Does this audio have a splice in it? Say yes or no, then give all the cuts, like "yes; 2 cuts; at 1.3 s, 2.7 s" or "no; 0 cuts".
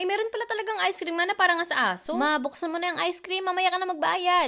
no; 0 cuts